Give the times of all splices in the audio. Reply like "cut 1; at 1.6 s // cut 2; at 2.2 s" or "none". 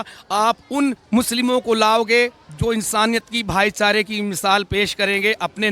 cut 1; at 1.0 s